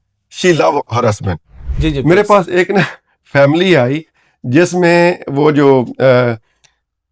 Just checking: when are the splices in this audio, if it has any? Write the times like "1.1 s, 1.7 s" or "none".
1.7 s

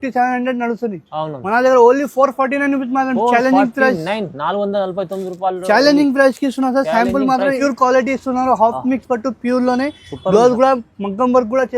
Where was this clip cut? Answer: 7.6 s

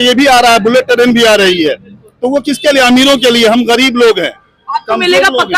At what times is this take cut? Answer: none

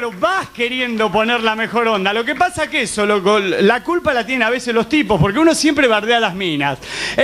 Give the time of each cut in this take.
1.0 s

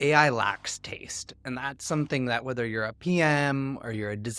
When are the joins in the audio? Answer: none

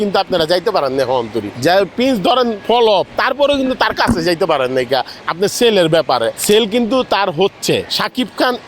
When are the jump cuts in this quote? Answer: 1.4 s, 2.8 s, 6.4 s, 7.9 s

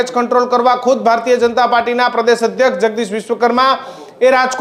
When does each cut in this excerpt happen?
none

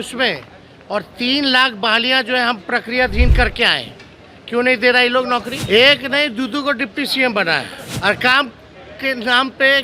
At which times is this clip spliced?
5.5 s, 7.8 s

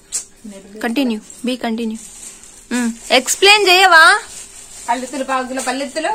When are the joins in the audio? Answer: none

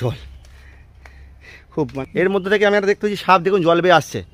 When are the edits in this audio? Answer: 2.0 s

